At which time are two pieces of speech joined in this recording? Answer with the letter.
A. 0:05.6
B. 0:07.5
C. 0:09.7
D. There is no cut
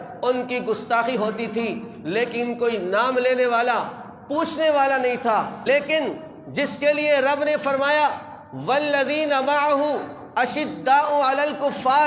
A